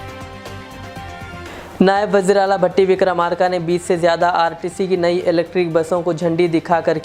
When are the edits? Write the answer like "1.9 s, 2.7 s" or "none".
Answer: none